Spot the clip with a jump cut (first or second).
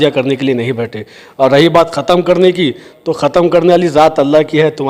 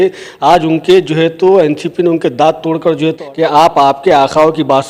second